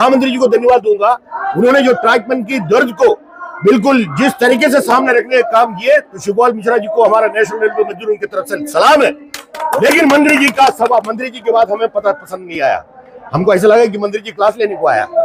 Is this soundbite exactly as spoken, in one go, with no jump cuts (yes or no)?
yes